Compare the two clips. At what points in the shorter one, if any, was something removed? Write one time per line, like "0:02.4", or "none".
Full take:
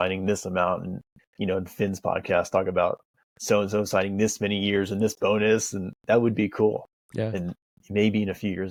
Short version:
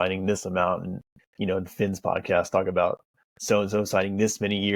none